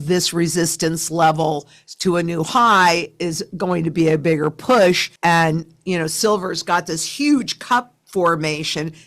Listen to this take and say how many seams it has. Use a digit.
0